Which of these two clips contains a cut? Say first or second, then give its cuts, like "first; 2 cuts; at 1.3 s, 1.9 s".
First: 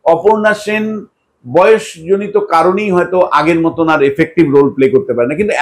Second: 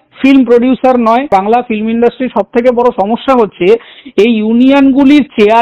second; 1 cut; at 1.3 s